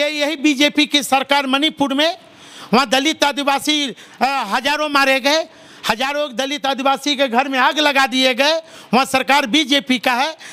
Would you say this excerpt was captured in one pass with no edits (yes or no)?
yes